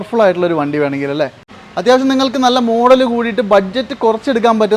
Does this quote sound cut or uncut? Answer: cut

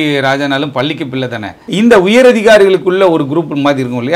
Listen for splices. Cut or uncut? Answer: cut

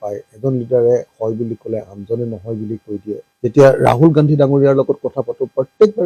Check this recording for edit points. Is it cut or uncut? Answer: uncut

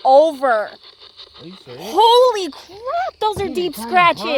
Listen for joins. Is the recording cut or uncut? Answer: uncut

